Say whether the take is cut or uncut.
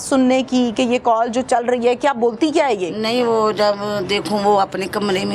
uncut